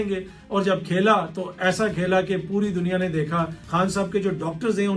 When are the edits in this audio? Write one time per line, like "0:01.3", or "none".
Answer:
0:03.6